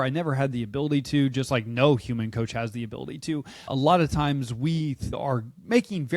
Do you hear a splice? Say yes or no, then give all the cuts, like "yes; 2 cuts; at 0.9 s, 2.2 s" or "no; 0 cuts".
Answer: yes; 2 cuts; at 3.7 s, 5.2 s